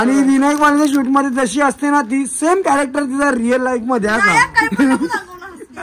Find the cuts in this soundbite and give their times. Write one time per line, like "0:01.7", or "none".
none